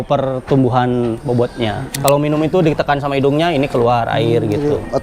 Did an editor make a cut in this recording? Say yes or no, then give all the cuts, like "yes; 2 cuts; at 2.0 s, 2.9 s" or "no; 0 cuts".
yes; 1 cut; at 2.0 s